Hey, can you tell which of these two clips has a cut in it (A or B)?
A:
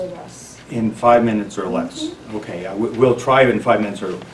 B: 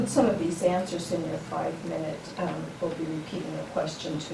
B